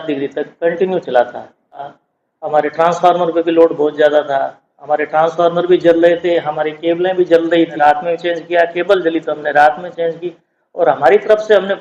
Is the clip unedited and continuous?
no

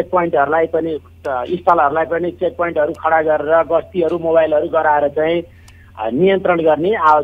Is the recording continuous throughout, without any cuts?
yes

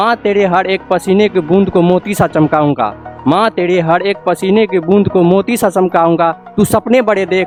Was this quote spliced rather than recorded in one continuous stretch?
no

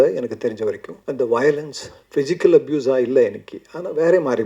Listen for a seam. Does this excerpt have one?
yes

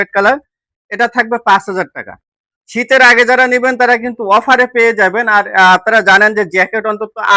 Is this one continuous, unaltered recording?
yes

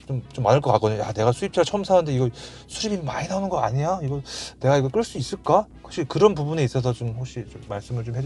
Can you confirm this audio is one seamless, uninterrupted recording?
yes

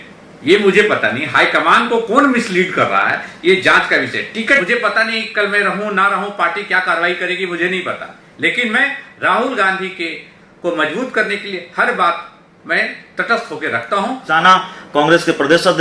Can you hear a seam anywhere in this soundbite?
yes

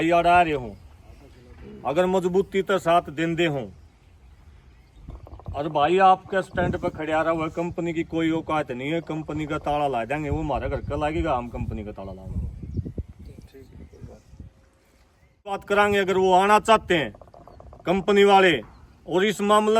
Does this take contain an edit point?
yes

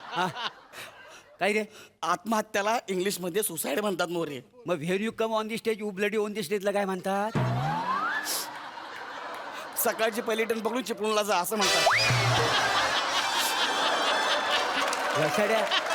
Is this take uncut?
yes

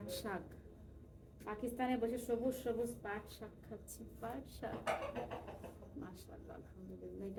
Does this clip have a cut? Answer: no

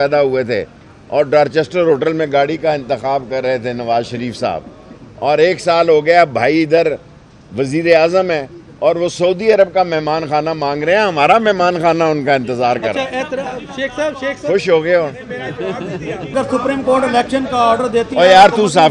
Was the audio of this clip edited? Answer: yes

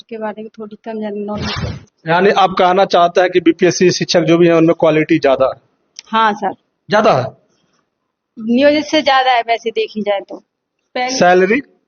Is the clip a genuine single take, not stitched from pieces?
no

